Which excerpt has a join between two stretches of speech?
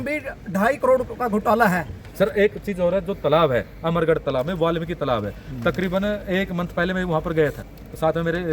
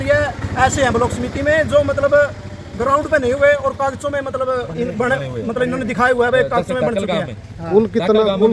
first; 1 cut; at 2.0 s

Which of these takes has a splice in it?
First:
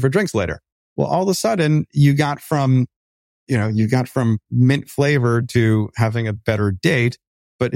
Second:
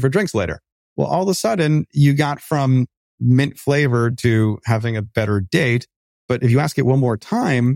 second; 1 cut; at 3.1 s

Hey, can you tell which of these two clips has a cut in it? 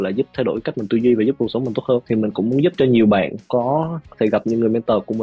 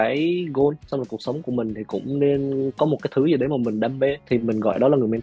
second; 1 cut; at 4.2 s

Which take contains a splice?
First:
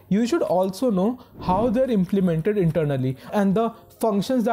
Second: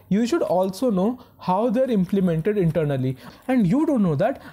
second; 1 cut; at 3.3 s

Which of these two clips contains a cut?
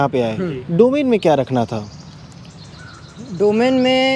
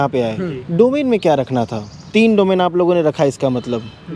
second; 1 cut; at 1.9 s

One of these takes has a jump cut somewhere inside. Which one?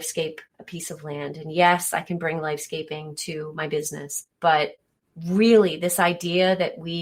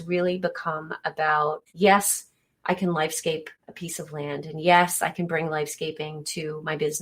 second; 1 cut; at 1.6 s

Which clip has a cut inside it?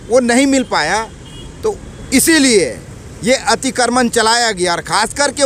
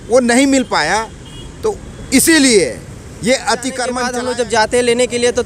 second; 1 cut; at 4.0 s

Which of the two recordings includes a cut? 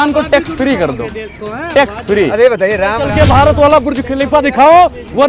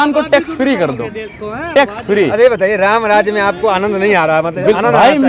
first; 1 cut; at 3.0 s

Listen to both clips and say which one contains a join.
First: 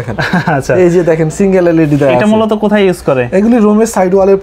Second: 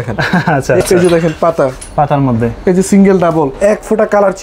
second; 2 cuts; at 0.8 s, 3.5 s

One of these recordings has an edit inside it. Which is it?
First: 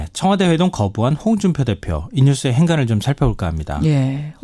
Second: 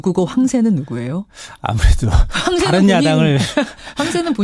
second; 1 cut; at 1.9 s

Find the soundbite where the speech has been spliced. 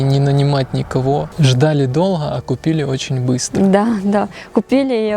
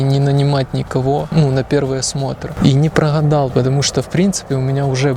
first; 1 cut; at 1.3 s

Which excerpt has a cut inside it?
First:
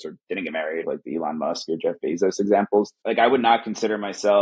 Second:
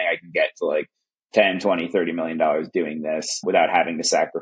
first; 2 cuts; at 0.8 s, 3.0 s

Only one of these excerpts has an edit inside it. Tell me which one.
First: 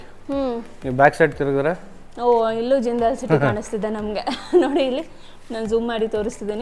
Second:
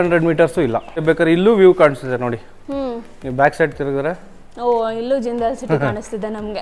second; 1 cut; at 1.0 s

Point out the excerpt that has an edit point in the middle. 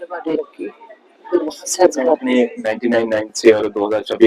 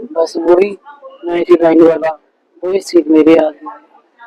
first; 1 cut; at 2.2 s

